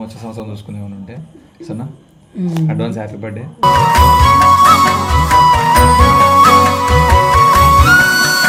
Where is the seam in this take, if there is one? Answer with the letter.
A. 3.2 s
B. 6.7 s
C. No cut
C